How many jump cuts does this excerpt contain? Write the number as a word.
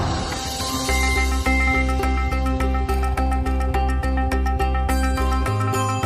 one